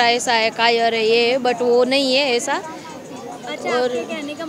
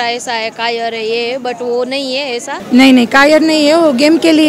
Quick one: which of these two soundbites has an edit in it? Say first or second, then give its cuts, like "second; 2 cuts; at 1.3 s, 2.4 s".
second; 1 cut; at 2.6 s